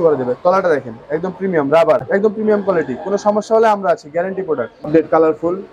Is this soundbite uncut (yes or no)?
no